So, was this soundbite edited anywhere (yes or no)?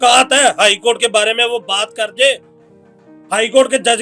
no